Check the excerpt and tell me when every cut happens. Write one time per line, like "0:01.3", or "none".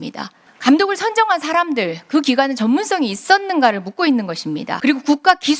0:04.7